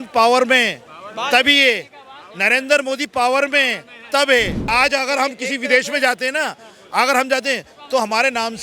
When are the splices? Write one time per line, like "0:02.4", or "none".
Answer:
0:04.7